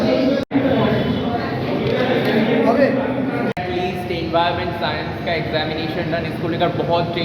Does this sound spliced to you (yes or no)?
yes